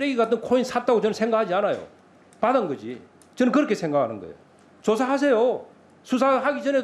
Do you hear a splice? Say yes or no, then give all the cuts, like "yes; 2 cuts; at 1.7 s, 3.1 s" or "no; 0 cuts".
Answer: no; 0 cuts